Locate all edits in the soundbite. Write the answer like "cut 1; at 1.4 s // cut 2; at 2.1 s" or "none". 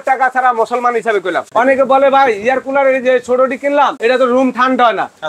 cut 1; at 1.5 s // cut 2; at 3.9 s